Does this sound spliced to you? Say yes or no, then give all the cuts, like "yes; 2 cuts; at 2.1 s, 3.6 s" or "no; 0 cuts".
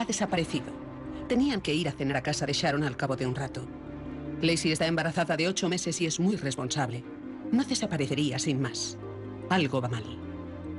no; 0 cuts